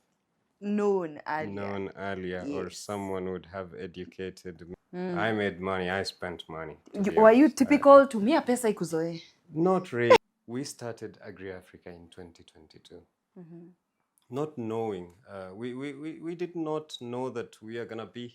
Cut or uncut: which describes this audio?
cut